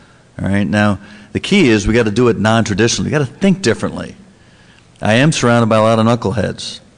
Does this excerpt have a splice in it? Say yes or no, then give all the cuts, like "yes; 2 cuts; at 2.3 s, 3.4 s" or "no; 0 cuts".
yes; 1 cut; at 5.9 s